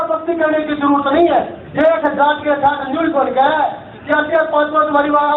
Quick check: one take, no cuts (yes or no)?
no